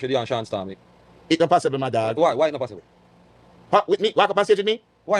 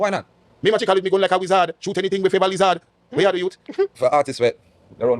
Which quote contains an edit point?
second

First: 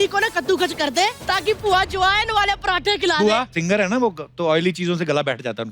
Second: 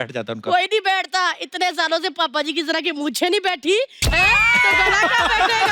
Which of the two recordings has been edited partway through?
first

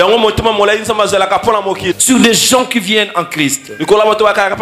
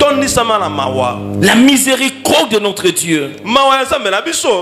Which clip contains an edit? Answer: first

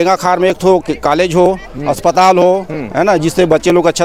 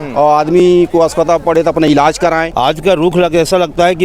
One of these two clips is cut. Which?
second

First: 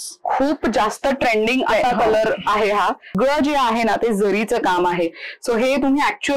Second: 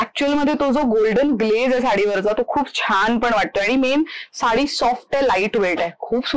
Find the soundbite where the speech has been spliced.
first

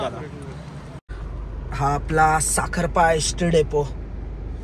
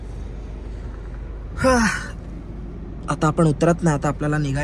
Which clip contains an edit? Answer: first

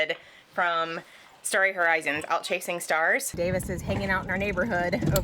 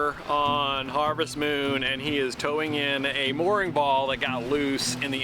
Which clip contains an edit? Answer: first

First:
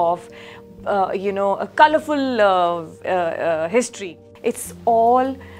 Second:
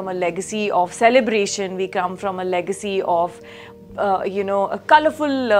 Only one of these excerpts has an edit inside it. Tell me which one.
first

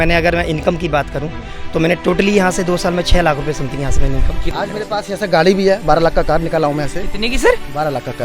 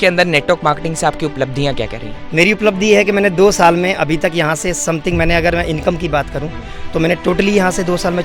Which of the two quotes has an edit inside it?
first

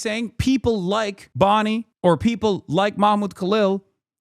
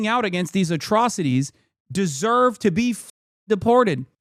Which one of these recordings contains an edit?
first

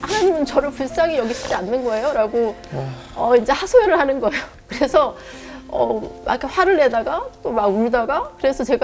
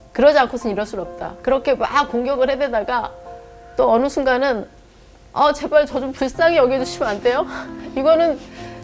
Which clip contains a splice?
second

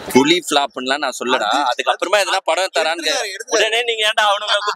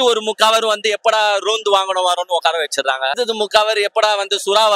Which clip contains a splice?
second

